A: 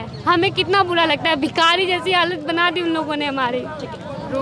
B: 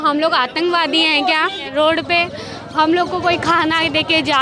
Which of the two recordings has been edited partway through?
B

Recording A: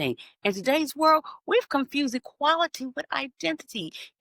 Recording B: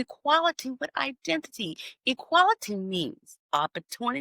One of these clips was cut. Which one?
B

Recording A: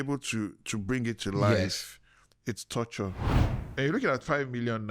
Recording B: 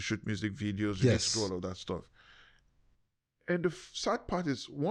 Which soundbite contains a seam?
A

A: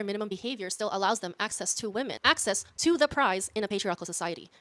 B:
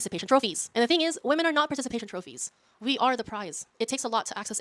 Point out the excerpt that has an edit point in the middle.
A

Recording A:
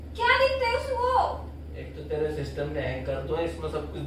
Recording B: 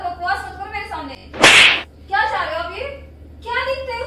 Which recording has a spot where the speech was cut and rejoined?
B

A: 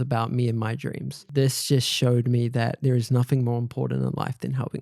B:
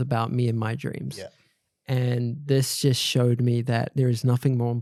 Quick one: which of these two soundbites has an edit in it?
A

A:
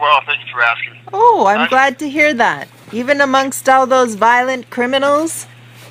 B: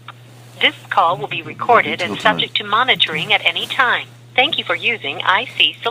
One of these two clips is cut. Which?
A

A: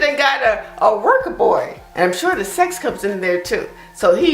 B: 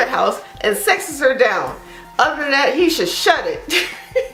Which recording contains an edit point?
A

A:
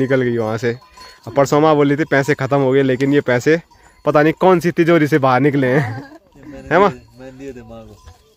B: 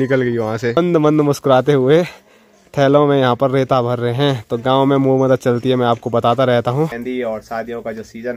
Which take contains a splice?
B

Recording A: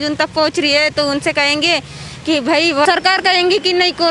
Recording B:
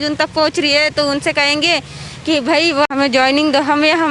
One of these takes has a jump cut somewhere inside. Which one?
A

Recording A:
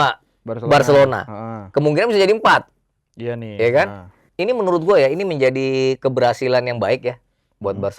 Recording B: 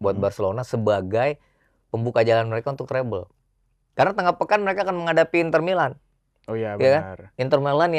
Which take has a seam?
A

